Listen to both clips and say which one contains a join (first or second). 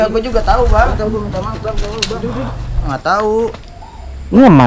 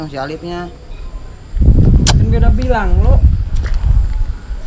first